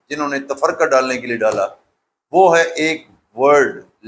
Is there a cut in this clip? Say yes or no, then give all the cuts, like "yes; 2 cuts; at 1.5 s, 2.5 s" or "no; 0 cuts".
no; 0 cuts